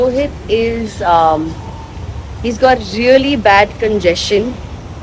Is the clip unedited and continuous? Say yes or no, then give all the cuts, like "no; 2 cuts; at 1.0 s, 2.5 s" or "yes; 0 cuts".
yes; 0 cuts